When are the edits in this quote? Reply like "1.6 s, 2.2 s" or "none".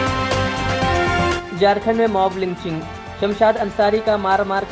1.3 s